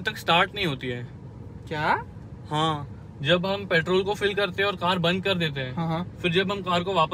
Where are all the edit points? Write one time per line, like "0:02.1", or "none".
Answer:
none

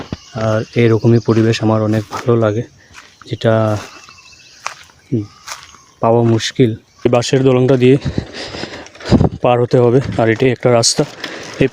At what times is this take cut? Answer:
0:07.1

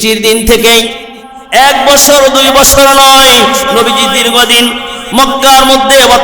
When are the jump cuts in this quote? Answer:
0:01.3

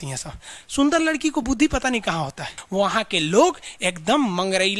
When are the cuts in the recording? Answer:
0:02.6

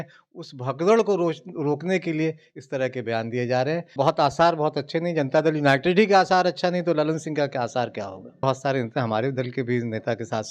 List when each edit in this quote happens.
0:03.9
0:08.4

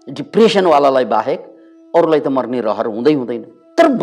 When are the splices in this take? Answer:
none

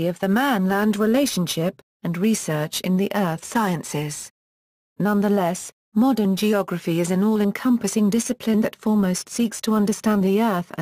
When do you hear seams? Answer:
0:02.4

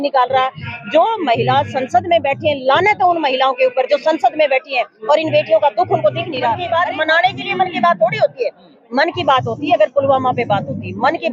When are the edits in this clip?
0:06.6

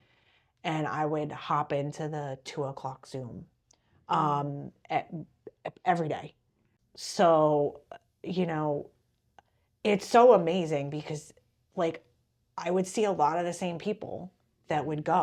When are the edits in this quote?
none

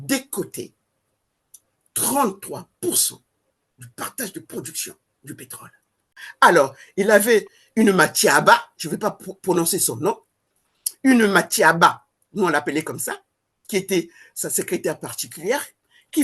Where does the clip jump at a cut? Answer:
0:06.2

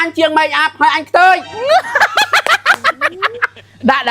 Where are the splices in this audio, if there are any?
0:01.6

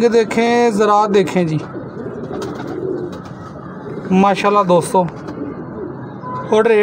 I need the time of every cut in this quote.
none

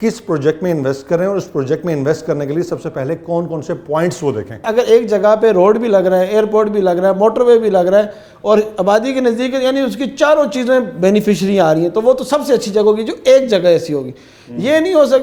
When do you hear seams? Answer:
none

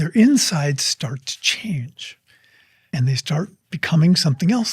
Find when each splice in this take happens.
none

